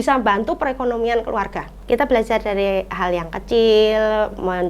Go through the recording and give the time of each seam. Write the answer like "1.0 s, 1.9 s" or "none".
1.7 s